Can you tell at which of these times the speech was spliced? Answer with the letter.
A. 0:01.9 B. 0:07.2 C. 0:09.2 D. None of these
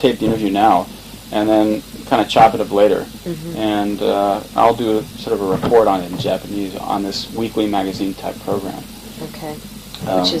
B